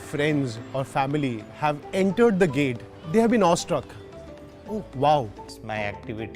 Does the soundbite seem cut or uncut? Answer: cut